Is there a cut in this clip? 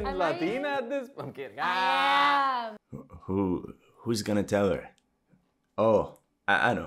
no; 0 cuts

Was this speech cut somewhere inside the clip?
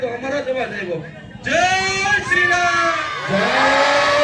no; 0 cuts

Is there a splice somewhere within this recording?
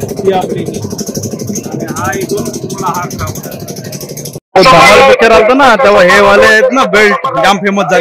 yes; 1 cut; at 4.4 s

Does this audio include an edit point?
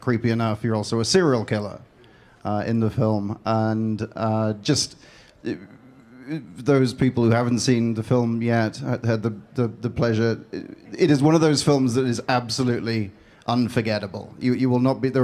no; 0 cuts

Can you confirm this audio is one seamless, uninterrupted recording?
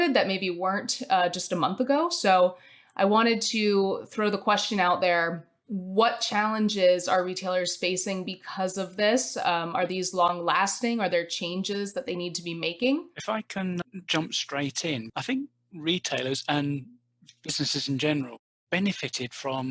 yes; 0 cuts

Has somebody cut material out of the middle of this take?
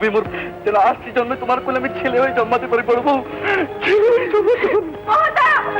no; 0 cuts

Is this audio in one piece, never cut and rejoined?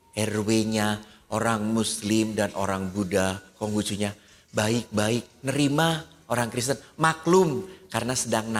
yes; 0 cuts

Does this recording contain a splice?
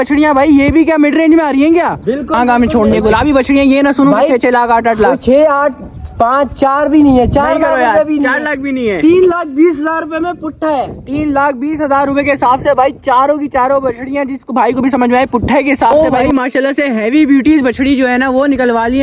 yes; 2 cuts; at 2.4 s, 15.9 s

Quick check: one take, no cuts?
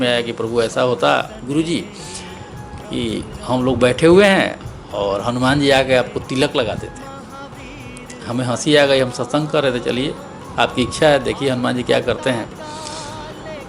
yes; 0 cuts

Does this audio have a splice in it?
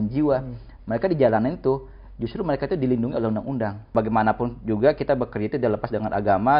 yes; 1 cut; at 3.9 s

